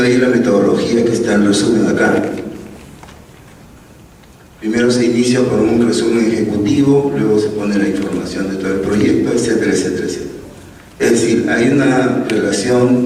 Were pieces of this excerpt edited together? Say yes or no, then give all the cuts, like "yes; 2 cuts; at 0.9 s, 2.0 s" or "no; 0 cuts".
no; 0 cuts